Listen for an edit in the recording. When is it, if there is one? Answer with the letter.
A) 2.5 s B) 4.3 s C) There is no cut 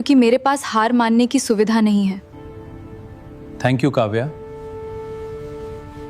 A